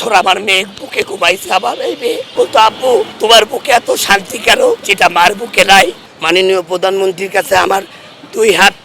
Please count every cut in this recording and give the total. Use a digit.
2